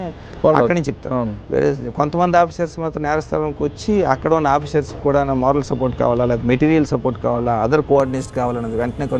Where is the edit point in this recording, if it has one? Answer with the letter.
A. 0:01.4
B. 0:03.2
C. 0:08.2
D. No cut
D